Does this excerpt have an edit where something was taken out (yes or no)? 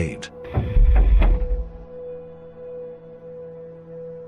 no